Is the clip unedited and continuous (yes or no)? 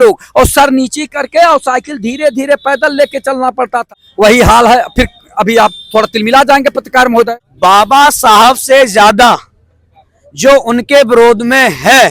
no